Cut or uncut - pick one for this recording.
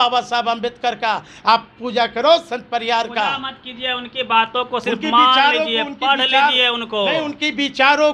uncut